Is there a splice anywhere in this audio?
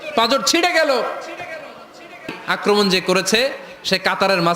yes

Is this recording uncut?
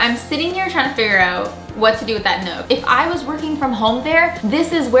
no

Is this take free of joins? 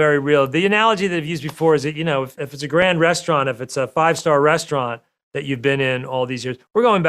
no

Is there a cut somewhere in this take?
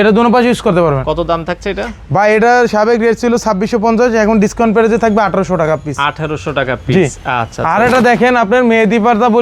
no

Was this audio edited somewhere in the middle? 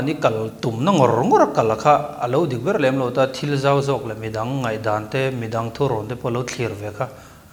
no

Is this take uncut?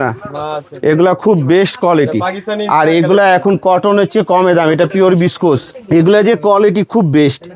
no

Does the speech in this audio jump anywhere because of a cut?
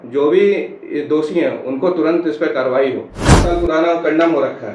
yes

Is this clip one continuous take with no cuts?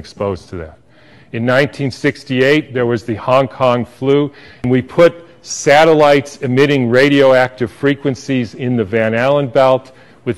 no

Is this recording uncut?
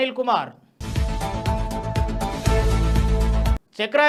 yes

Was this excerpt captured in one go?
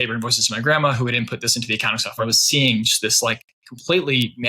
no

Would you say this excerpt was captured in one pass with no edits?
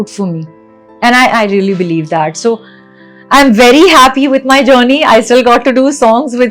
yes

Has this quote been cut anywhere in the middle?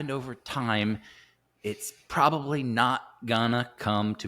no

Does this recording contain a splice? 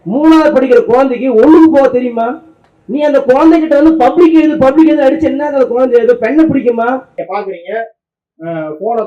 yes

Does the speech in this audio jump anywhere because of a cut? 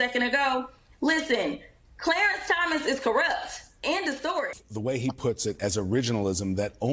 yes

